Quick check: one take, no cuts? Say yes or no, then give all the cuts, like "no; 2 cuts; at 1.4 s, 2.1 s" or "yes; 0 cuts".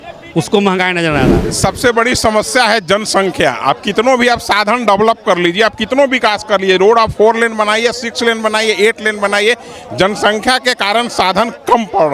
no; 1 cut; at 1.4 s